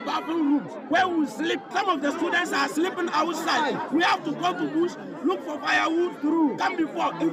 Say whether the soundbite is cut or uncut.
cut